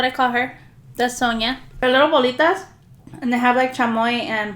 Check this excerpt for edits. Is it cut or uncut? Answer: cut